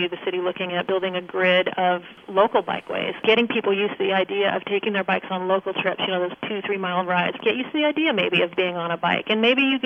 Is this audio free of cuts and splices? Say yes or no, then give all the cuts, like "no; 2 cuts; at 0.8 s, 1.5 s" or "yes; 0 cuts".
no; 4 cuts; at 0.9 s, 2.2 s, 3.2 s, 7.4 s